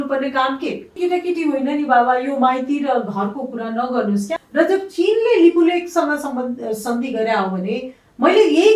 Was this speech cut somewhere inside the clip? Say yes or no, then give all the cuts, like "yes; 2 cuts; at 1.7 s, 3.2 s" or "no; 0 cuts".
yes; 2 cuts; at 1.0 s, 4.4 s